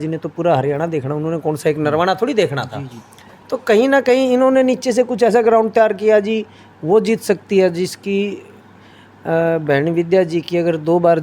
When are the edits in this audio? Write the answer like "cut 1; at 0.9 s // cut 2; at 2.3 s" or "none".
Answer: none